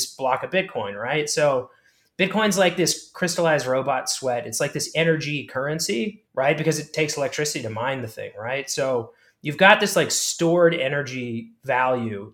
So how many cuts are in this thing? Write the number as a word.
zero